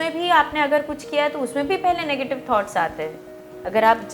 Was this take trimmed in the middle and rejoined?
no; 0 cuts

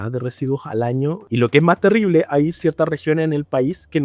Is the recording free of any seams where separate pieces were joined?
no; 1 cut; at 1.2 s

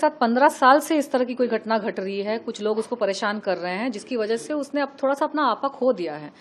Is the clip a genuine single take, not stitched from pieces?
yes; 0 cuts

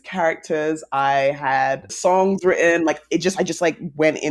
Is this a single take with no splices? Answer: no; 1 cut; at 1.9 s

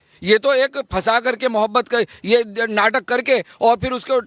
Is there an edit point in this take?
no; 0 cuts

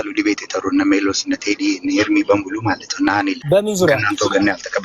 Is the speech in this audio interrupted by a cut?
yes; 1 cut; at 3.4 s

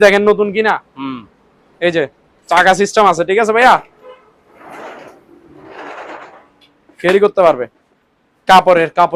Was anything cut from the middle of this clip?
no; 0 cuts

